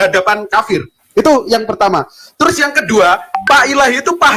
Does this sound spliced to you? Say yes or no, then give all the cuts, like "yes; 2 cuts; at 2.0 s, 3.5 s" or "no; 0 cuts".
no; 0 cuts